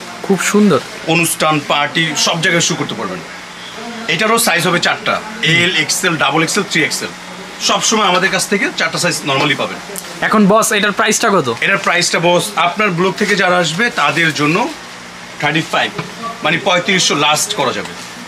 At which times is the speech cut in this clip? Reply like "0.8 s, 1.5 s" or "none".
none